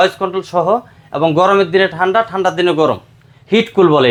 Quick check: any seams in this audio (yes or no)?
no